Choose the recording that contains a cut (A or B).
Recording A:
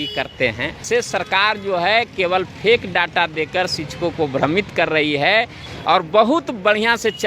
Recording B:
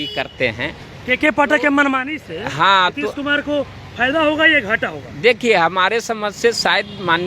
A